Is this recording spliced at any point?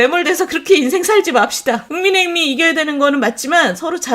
yes; 1 cut; at 1.9 s

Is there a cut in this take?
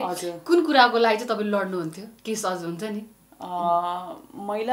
no; 0 cuts

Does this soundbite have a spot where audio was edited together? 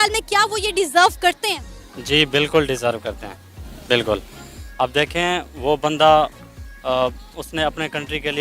no; 0 cuts

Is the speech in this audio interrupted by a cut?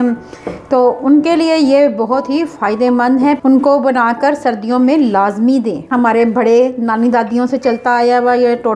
yes; 2 cuts; at 3.4 s, 5.9 s

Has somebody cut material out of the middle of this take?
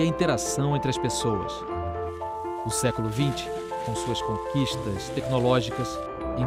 no; 0 cuts

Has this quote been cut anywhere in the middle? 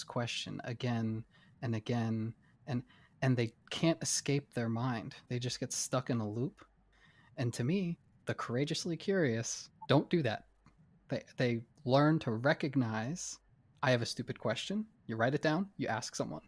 no; 0 cuts

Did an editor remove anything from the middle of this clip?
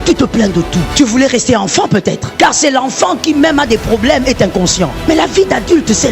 yes; 3 cuts; at 0.9 s, 2.3 s, 5.1 s

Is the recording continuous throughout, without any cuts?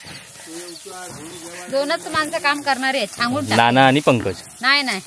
yes; 0 cuts

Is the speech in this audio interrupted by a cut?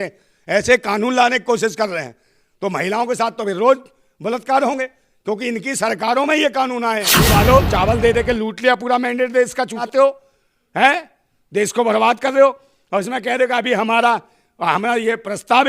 yes; 2 cuts; at 7.1 s, 9.8 s

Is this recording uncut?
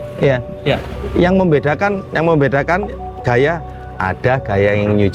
yes; 0 cuts

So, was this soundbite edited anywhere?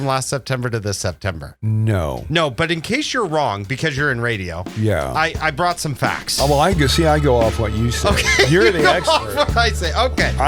no; 0 cuts

